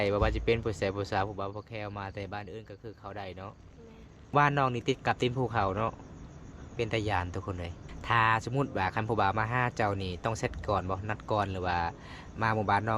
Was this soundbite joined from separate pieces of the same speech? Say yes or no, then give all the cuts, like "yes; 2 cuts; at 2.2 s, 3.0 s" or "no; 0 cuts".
yes; 2 cuts; at 4.3 s, 7.9 s